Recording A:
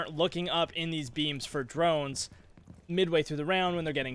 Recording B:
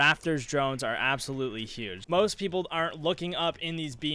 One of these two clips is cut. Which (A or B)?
B